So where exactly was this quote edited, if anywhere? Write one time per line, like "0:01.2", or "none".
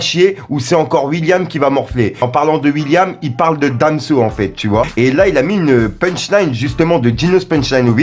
none